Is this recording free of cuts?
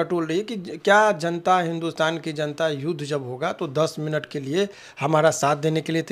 yes; 0 cuts

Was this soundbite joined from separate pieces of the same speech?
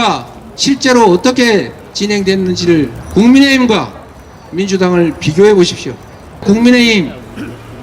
yes; 2 cuts; at 3.0 s, 6.4 s

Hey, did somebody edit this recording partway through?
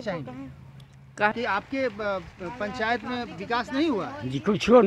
yes; 1 cut; at 1.3 s

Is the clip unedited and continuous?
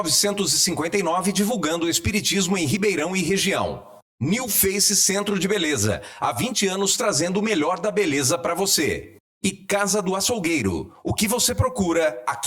yes; 0 cuts

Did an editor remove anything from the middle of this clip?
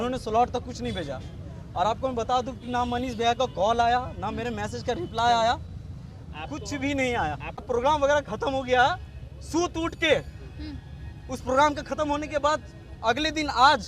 yes; 1 cut; at 7.7 s

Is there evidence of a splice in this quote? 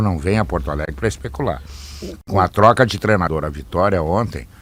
no; 0 cuts

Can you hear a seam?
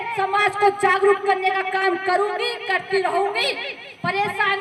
no; 0 cuts

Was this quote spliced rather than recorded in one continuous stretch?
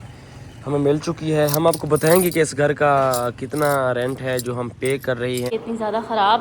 yes; 1 cut; at 5.5 s

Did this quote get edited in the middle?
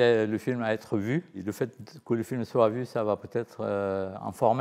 no; 0 cuts

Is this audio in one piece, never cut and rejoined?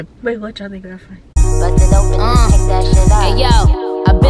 no; 1 cut; at 1.6 s

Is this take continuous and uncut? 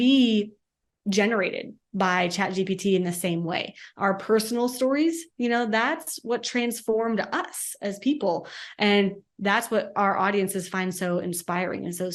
yes; 0 cuts

